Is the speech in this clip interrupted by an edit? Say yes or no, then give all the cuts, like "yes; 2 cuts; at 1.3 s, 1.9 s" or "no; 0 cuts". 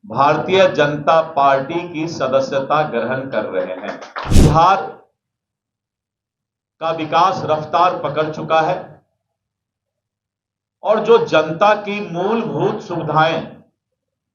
yes; 1 cut; at 4.2 s